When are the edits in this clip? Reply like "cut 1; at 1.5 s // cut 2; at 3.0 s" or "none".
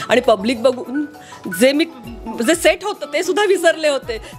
none